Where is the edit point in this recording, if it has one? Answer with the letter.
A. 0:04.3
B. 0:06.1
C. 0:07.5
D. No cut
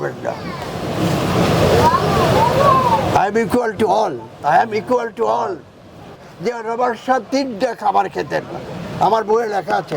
B